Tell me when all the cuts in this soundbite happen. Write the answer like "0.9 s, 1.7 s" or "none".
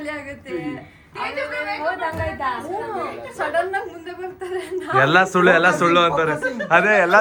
none